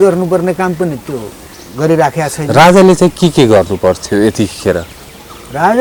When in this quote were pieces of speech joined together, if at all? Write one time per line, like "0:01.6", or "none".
none